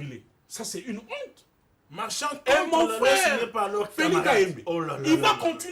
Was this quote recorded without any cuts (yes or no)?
yes